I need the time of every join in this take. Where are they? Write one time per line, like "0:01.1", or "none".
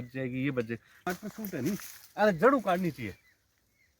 0:01.0